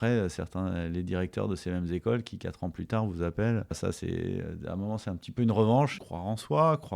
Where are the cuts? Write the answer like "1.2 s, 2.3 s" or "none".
3.8 s, 5.9 s

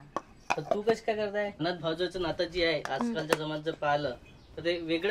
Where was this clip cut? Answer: 1.6 s

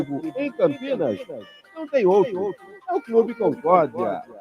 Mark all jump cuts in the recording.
3.3 s

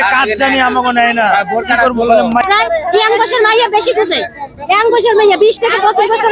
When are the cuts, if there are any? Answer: 2.4 s

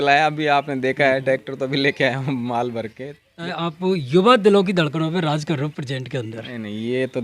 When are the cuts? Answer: 3.4 s

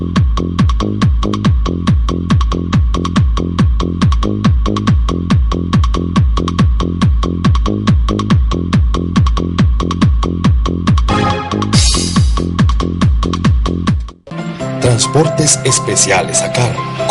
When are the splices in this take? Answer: 14.2 s

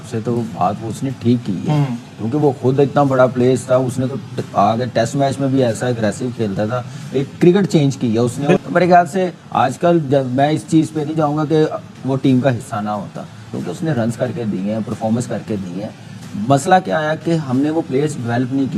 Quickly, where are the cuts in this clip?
none

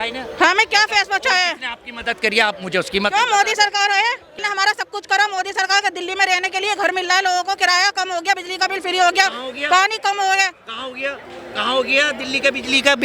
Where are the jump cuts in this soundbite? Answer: 4.4 s

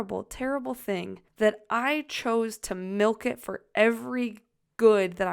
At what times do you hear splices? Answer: 1.2 s

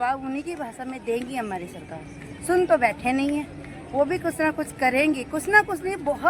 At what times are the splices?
none

